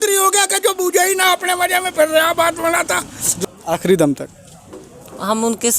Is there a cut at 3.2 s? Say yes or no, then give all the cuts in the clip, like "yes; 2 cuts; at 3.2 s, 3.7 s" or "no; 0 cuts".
yes; 1 cut; at 3.2 s